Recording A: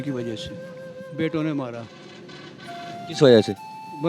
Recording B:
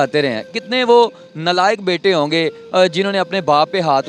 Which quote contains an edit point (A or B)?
A